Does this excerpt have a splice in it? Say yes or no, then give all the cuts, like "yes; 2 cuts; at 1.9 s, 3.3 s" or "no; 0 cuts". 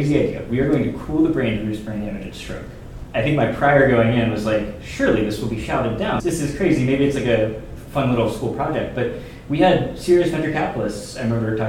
no; 0 cuts